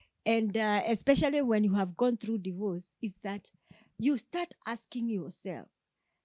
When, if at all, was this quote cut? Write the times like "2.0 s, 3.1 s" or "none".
none